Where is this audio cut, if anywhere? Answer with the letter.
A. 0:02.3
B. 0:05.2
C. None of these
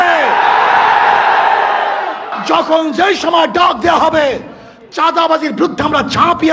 A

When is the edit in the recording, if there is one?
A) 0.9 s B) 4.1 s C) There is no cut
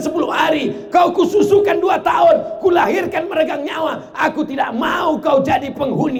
C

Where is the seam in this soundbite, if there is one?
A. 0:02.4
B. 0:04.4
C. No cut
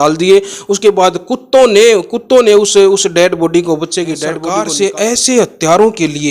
B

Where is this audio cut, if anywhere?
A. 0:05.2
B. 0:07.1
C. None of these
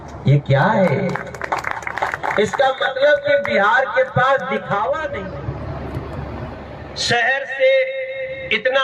A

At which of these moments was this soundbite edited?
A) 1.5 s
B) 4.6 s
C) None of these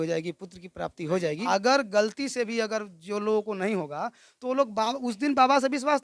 A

